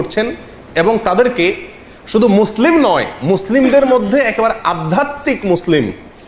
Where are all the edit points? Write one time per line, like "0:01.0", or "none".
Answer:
none

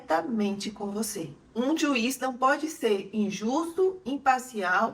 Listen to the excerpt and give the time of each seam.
0:01.5

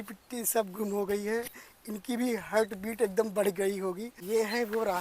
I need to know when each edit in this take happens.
0:04.1

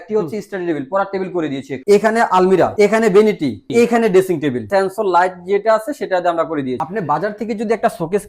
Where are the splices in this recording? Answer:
0:01.7
0:02.7
0:03.7
0:04.6
0:06.8

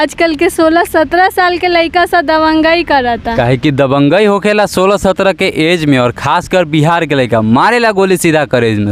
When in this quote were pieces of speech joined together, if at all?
none

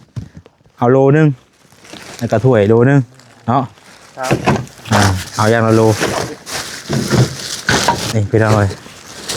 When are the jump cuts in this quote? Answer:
0:08.1

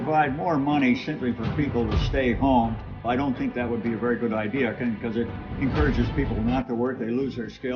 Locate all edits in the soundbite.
0:03.0

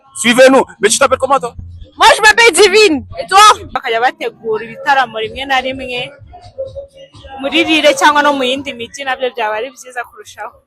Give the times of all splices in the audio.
0:03.8

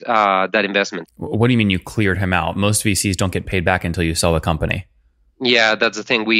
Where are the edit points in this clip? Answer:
0:01.0

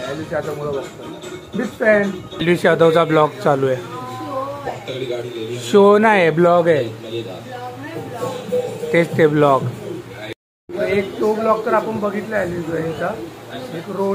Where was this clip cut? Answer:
0:02.4
0:10.2

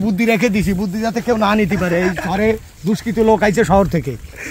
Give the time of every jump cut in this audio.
none

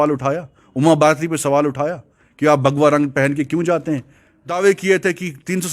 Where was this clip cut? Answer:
0:04.5

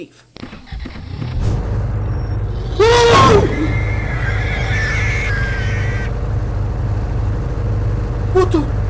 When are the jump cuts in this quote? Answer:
0:01.4

